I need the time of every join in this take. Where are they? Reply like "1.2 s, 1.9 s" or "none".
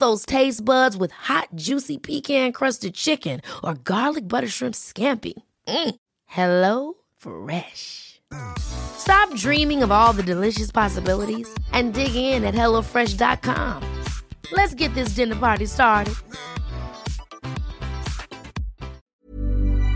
19.0 s